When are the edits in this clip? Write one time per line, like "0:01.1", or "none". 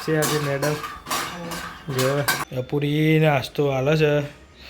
0:02.4